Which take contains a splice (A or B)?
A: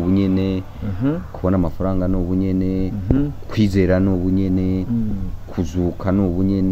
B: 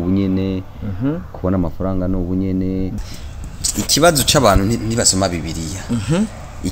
B